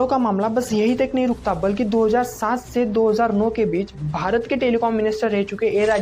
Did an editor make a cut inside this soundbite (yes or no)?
no